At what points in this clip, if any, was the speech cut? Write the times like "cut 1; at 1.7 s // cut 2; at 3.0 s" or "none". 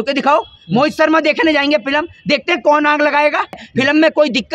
cut 1; at 3.6 s